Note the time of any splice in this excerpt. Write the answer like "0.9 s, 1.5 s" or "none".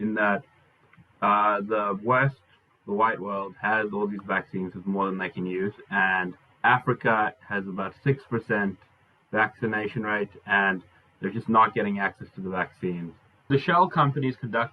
13.5 s